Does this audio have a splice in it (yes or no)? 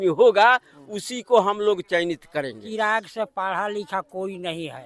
yes